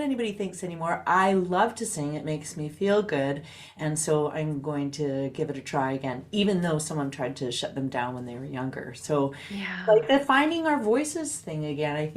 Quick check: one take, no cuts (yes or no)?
yes